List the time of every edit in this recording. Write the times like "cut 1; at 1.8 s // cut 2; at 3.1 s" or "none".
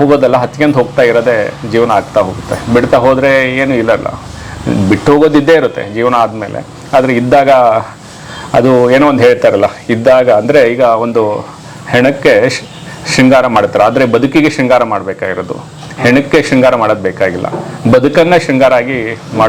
none